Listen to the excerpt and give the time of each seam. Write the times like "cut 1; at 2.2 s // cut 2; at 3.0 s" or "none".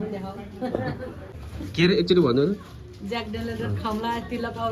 cut 1; at 1.3 s